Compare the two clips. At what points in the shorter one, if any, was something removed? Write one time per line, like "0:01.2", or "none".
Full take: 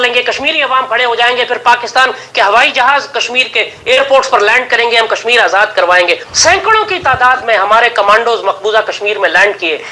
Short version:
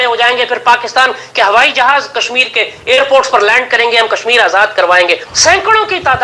none